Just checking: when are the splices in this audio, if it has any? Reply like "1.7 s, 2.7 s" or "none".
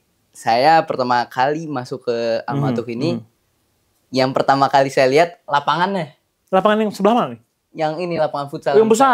none